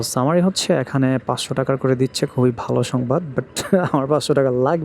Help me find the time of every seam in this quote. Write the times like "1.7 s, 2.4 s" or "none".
none